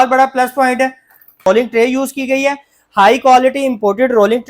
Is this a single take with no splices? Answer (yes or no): no